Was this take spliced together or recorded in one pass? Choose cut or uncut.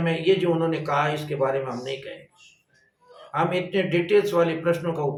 uncut